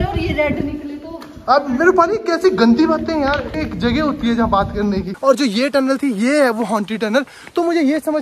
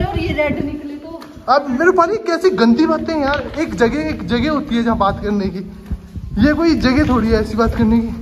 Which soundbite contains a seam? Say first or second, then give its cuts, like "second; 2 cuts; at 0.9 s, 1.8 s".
first; 2 cuts; at 3.5 s, 5.1 s